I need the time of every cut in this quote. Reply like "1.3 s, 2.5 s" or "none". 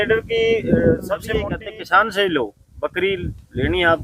1.6 s